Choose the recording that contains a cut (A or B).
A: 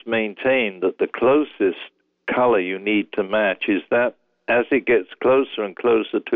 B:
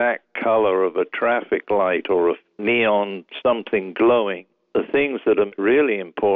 B